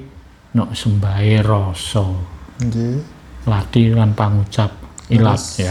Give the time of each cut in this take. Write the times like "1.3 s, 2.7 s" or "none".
none